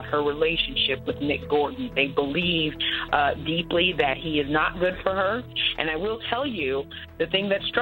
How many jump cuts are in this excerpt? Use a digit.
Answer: 0